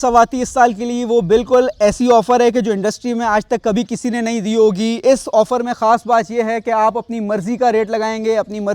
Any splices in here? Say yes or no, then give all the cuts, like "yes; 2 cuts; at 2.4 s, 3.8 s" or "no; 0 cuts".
no; 0 cuts